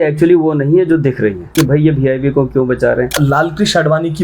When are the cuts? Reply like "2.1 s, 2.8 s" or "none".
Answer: 1.5 s, 3.1 s